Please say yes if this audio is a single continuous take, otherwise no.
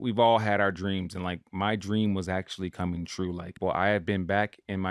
no